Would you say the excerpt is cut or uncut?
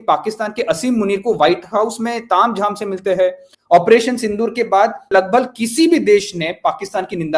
cut